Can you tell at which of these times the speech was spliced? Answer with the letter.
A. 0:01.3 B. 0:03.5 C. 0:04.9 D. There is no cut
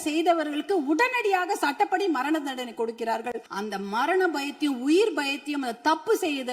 B